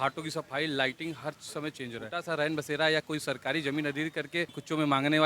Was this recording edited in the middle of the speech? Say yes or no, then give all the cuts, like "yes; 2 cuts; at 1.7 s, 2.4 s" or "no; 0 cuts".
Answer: yes; 1 cut; at 2.1 s